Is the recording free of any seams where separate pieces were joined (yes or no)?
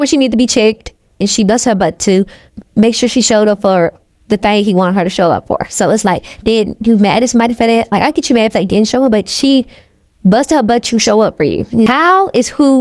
no